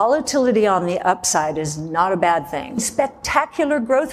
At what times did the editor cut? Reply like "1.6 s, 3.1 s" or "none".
2.9 s